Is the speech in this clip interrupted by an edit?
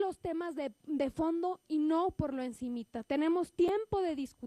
yes; 1 cut; at 2.5 s

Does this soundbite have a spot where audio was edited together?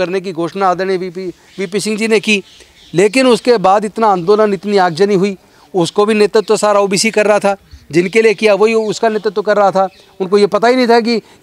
no; 0 cuts

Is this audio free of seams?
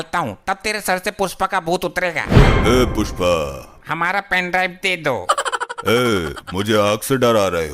no; 1 cut; at 3.7 s

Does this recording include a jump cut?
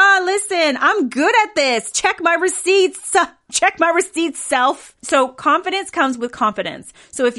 yes; 1 cut; at 4.9 s

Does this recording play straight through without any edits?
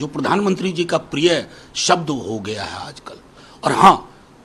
yes; 0 cuts

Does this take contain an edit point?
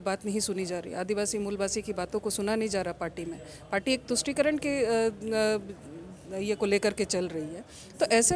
no; 0 cuts

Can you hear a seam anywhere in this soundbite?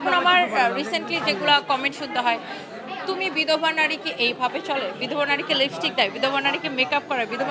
no; 0 cuts

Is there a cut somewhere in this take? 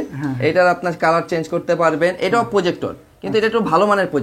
no; 0 cuts

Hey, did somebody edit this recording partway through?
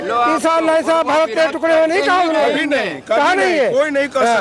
no; 0 cuts

